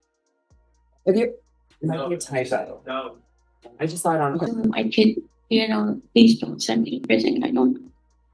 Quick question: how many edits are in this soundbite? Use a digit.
1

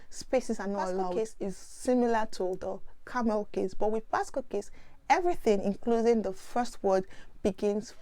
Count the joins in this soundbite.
1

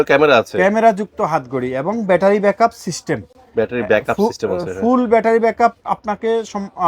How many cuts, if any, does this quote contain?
0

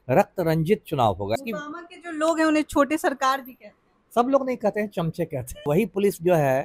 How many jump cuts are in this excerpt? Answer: 2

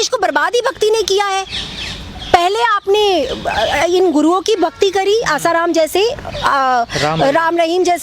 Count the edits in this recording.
0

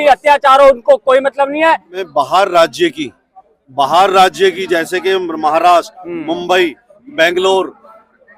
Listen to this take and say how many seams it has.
1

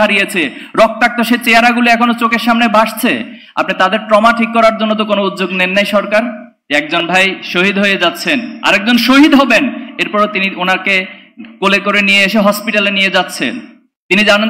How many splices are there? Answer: 1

